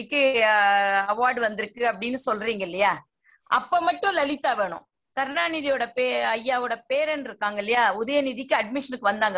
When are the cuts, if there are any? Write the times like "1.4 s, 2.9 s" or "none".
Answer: 5.1 s